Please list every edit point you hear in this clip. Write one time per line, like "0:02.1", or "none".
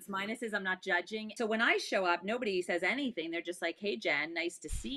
0:01.3